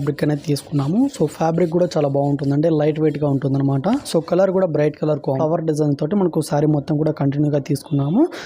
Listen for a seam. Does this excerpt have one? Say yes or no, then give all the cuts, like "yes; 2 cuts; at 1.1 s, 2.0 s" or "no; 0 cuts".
yes; 1 cut; at 5.4 s